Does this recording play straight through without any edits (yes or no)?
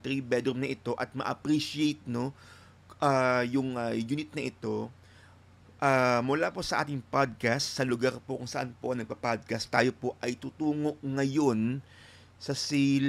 yes